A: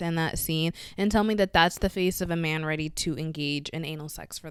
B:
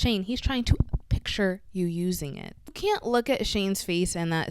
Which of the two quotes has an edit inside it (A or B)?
B